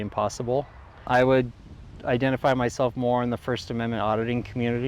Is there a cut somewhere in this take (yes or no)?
yes